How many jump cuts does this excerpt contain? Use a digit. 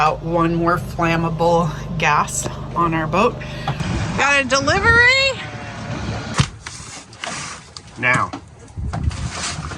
2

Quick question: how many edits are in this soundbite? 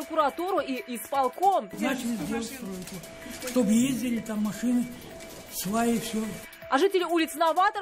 0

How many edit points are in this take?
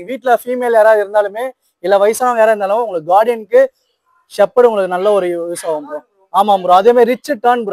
0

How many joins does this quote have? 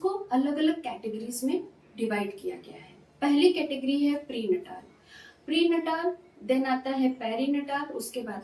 0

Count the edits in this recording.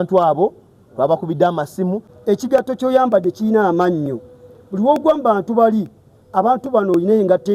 1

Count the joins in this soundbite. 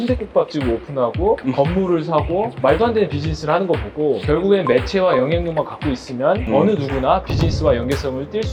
4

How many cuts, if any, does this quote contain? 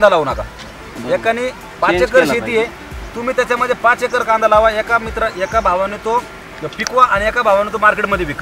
0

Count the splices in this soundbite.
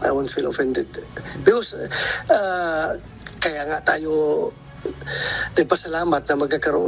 0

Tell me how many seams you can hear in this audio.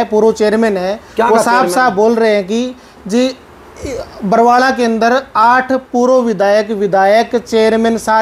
0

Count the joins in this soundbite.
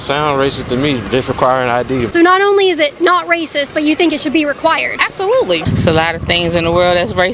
2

